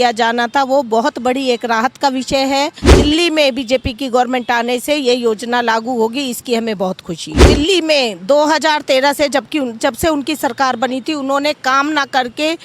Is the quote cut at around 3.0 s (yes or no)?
yes